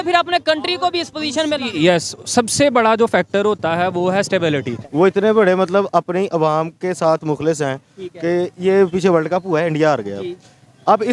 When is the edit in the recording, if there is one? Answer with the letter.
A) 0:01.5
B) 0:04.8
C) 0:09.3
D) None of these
B